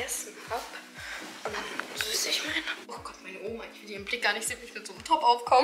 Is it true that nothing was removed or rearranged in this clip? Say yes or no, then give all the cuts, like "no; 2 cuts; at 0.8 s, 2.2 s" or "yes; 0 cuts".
no; 1 cut; at 2.8 s